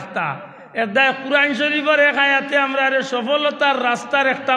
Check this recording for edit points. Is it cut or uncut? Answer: uncut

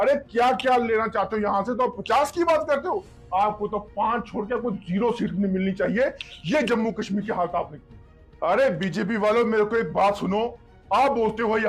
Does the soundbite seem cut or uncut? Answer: uncut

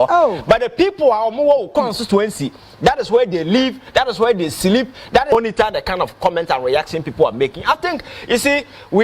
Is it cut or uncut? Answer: cut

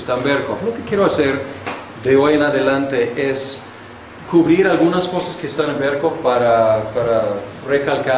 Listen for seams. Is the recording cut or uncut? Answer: cut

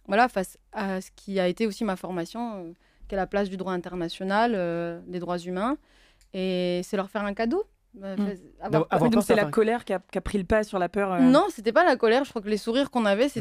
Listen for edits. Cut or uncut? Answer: uncut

